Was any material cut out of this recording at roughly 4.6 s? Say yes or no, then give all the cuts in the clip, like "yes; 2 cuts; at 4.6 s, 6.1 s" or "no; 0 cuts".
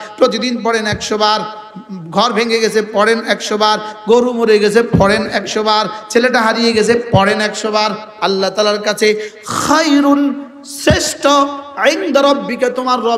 no; 1 cut; at 8.1 s